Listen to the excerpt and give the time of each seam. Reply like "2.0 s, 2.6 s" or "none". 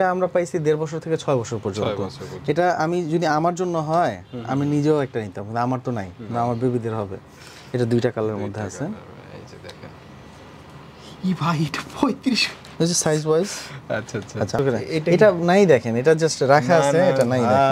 14.5 s